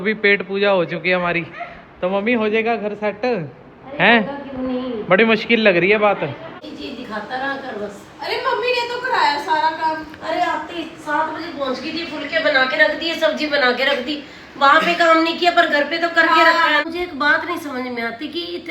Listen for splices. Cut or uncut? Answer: cut